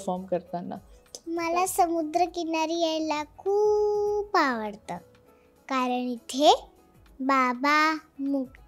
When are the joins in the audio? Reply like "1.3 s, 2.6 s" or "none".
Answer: 1.2 s